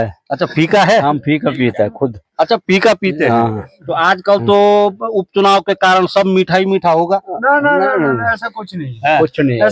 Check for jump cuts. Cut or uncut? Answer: uncut